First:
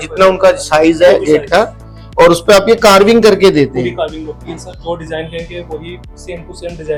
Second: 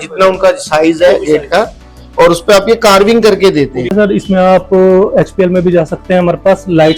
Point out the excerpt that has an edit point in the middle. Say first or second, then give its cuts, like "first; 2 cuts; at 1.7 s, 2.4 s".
second; 1 cut; at 3.9 s